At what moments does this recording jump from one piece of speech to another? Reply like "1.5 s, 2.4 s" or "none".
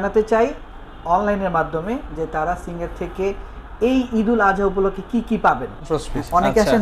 5.9 s

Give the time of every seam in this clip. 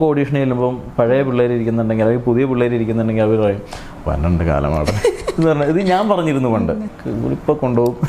7.0 s

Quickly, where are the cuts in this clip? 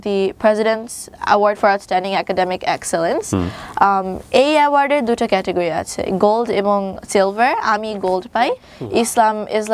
8.6 s

